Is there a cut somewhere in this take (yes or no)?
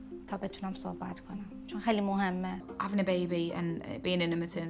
yes